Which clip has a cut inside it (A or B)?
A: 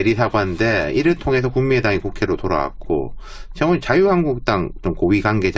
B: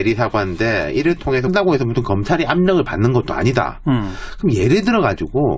A